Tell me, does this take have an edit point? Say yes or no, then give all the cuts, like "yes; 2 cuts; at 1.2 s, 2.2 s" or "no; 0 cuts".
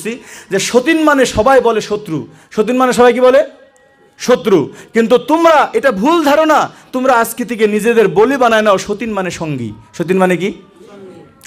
no; 0 cuts